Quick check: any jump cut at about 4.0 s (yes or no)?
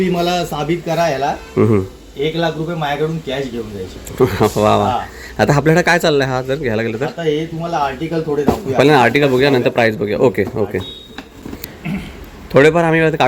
no